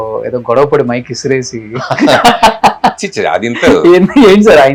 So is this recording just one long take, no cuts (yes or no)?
yes